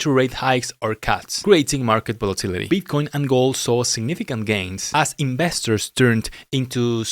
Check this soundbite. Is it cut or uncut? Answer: cut